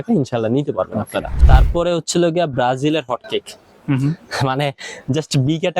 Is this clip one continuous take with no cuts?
no; 1 cut; at 1.3 s

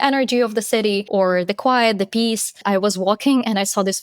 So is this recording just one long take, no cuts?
no; 2 cuts; at 1.0 s, 2.6 s

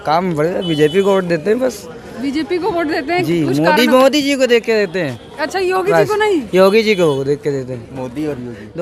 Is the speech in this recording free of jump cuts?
yes; 0 cuts

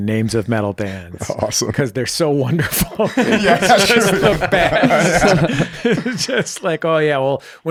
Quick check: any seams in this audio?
no; 0 cuts

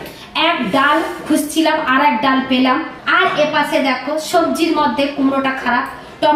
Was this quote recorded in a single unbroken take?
no; 1 cut; at 2.9 s

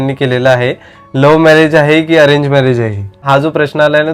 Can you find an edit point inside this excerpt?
yes; 1 cut; at 3.2 s

